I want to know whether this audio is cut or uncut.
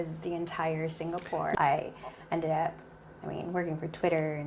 cut